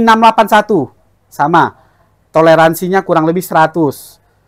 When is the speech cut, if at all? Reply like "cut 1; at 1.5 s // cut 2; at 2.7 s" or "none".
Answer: none